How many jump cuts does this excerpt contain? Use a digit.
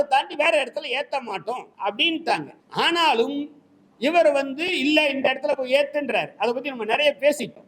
2